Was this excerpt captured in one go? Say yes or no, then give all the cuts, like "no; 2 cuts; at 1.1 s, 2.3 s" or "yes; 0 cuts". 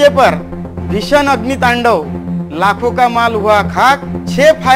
yes; 0 cuts